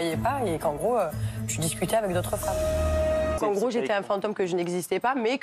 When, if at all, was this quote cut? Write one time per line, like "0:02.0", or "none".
0:03.4